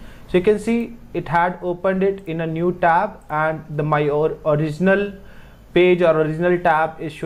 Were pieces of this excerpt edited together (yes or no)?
no